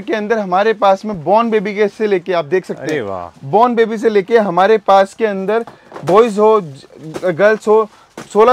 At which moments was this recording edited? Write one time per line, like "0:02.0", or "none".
none